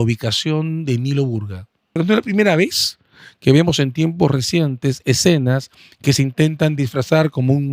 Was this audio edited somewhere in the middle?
yes; 1 cut; at 2.0 s

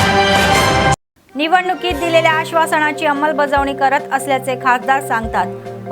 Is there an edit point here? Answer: yes; 1 cut; at 1.0 s

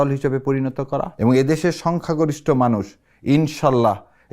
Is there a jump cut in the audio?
yes; 1 cut; at 1.1 s

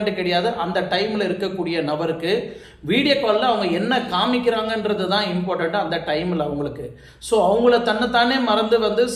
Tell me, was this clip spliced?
no; 0 cuts

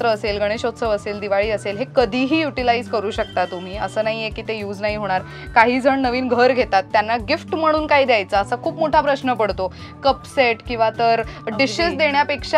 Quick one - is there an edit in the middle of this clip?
no; 0 cuts

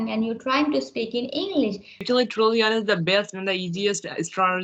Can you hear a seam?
yes; 1 cut; at 2.0 s

